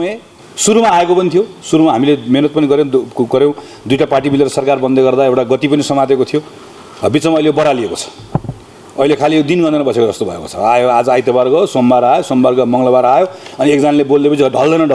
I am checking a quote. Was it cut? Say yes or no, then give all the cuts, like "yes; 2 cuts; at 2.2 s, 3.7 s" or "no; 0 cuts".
no; 0 cuts